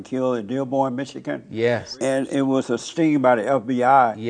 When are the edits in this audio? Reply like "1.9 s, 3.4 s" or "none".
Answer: 1.9 s, 2.9 s

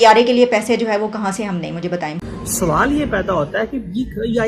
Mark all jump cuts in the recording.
2.2 s

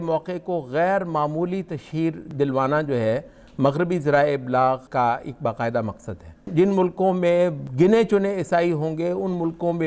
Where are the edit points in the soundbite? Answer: 2.2 s, 4.9 s, 6.5 s, 7.6 s

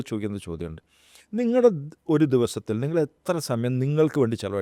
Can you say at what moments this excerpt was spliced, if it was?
none

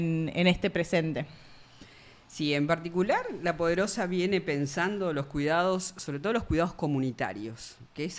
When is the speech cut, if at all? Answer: none

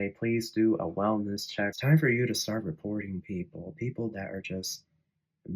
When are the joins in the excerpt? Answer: 1.8 s

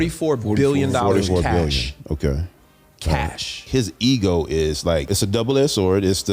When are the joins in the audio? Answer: 3.7 s, 5.1 s

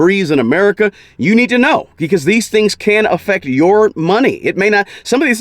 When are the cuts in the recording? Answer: none

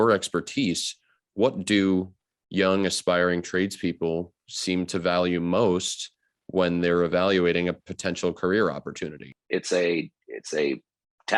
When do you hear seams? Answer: 9.4 s

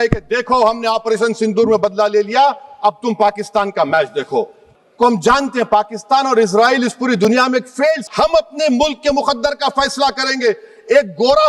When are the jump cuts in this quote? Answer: 4.6 s, 8.0 s

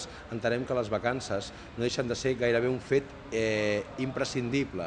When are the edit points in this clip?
none

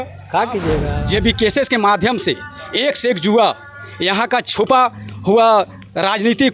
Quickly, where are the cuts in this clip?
0.9 s

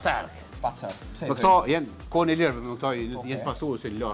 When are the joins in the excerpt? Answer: none

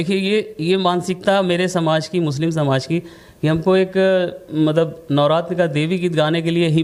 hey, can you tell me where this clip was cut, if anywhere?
none

